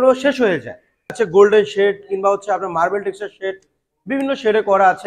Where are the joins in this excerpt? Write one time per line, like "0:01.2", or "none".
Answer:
0:01.1